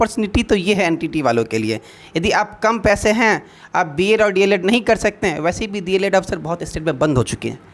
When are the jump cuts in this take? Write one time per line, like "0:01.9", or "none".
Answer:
none